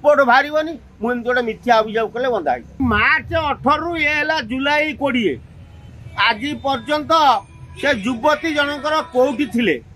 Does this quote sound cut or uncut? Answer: cut